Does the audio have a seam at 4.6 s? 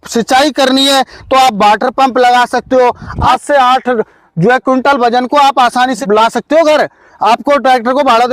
no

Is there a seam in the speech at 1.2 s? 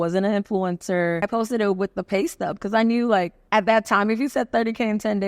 yes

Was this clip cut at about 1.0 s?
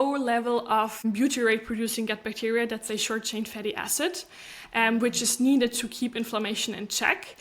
yes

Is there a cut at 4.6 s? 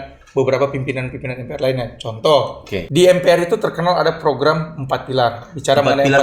no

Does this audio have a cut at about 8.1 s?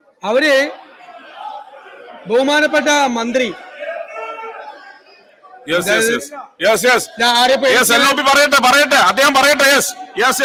no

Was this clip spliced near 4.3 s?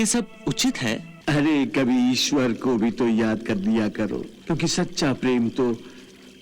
yes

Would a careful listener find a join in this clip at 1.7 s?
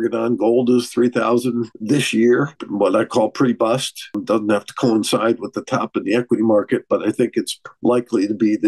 yes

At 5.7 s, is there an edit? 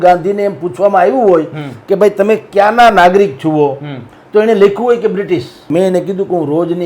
yes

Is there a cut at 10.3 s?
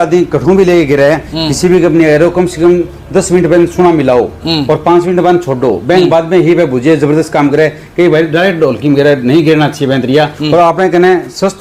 yes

